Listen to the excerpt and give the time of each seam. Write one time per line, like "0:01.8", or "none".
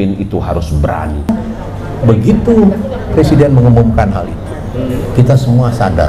0:01.2